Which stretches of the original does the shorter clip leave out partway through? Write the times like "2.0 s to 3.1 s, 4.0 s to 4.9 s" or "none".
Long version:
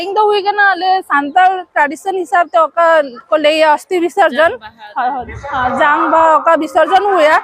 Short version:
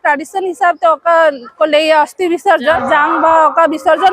4.5 s to 5.7 s